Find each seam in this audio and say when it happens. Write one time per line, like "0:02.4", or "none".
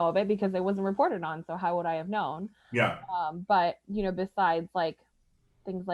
none

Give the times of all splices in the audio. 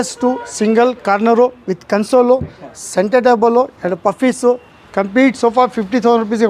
none

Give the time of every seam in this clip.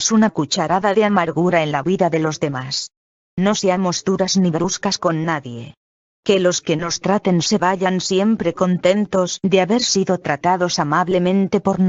0:10.6

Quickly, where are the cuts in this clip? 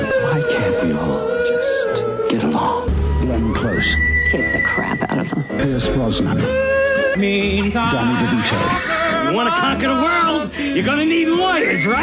none

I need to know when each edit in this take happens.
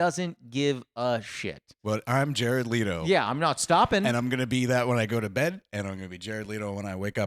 0:01.8

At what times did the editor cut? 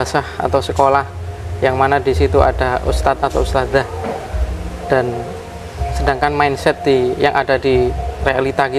none

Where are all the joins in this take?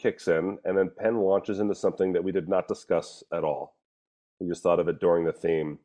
none

